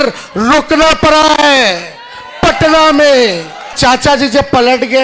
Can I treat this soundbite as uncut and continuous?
no; 1 cut; at 3.7 s

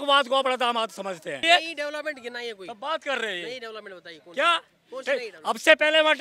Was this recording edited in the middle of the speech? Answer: yes; 1 cut; at 1.4 s

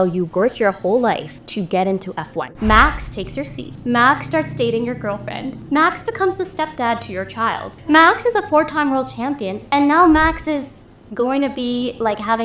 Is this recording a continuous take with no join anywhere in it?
no; 5 cuts; at 1.4 s, 2.4 s, 3.6 s, 5.6 s, 7.7 s

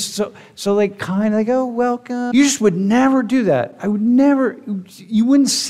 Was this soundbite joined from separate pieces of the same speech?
yes; 1 cut; at 2.3 s

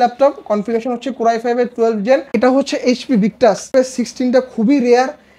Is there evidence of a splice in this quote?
yes; 2 cuts; at 2.3 s, 3.7 s

